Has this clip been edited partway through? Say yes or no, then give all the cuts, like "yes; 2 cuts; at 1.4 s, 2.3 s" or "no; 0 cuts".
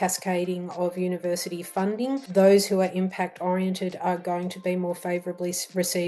yes; 1 cut; at 2.2 s